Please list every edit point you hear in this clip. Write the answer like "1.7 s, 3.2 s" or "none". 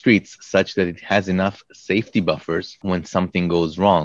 2.8 s